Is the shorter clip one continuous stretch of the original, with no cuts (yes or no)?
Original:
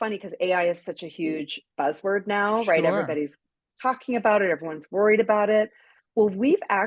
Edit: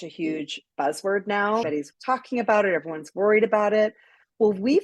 no